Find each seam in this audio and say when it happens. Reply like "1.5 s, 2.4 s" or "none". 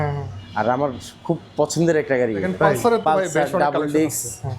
2.6 s